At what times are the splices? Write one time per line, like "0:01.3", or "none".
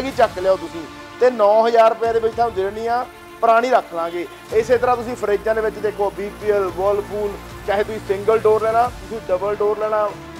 none